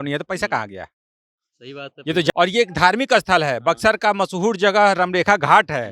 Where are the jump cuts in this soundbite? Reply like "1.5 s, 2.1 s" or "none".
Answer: 2.3 s